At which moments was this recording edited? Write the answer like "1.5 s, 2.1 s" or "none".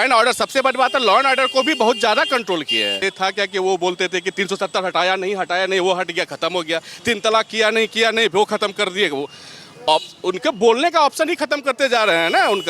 3.0 s